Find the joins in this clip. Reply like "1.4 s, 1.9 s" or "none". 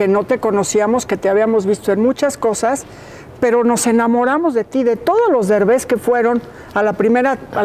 none